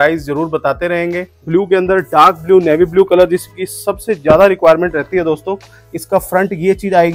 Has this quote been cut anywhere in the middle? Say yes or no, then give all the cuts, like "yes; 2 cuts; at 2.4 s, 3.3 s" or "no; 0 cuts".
yes; 1 cut; at 1.4 s